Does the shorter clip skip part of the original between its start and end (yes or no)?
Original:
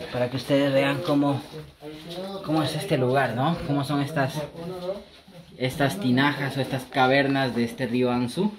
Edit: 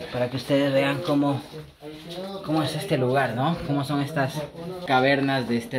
yes